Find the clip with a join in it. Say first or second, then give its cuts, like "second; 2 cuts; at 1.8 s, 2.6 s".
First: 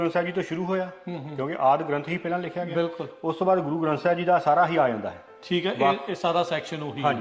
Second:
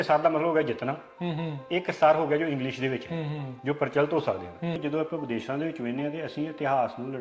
second; 1 cut; at 4.8 s